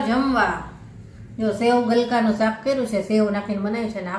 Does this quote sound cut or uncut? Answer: uncut